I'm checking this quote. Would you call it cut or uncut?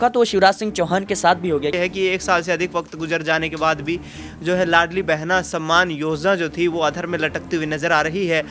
cut